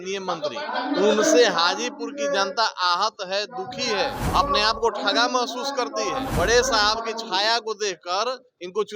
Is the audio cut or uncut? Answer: cut